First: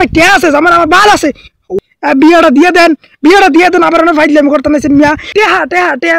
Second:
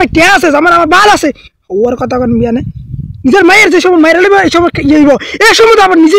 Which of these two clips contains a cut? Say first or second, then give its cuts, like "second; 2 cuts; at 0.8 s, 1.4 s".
first; 2 cuts; at 1.7 s, 5.3 s